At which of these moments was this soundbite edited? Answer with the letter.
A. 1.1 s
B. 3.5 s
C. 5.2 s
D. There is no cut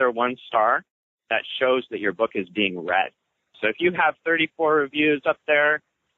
B